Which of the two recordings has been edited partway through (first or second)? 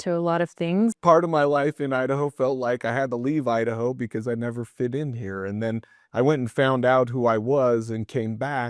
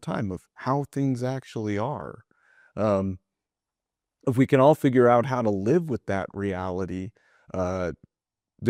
first